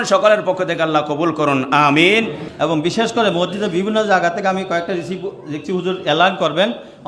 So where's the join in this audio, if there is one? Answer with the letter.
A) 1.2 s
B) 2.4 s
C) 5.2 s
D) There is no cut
B